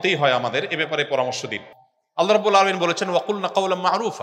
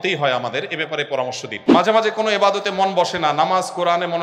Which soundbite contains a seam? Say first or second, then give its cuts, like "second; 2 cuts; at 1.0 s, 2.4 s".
second; 1 cut; at 1.7 s